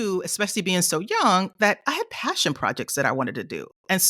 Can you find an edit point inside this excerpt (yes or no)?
no